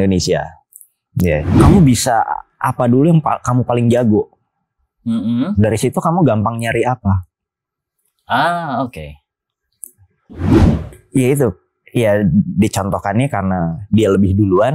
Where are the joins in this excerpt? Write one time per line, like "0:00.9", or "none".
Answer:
0:01.6